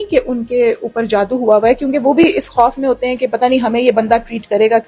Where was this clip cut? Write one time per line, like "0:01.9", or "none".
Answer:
none